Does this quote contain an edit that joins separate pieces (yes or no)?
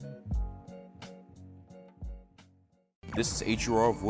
yes